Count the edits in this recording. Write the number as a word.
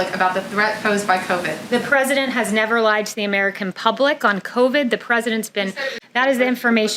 one